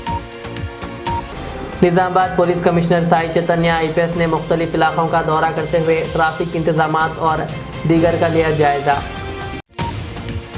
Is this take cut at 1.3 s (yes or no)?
yes